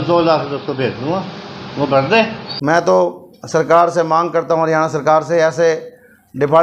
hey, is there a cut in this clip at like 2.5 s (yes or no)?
yes